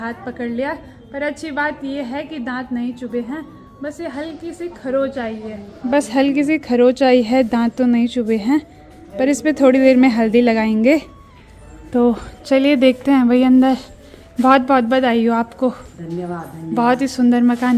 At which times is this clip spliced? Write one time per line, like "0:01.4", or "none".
none